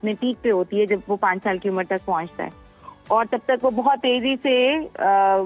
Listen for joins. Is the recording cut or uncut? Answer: uncut